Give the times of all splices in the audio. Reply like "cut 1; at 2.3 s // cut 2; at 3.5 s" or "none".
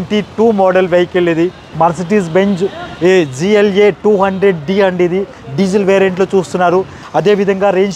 cut 1; at 1.6 s // cut 2; at 7.0 s